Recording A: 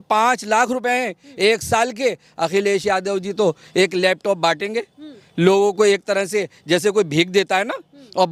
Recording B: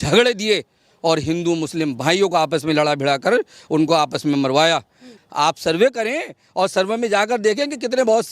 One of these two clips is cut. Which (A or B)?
B